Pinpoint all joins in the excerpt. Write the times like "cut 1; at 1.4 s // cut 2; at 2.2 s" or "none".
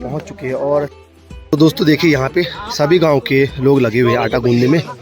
cut 1; at 0.9 s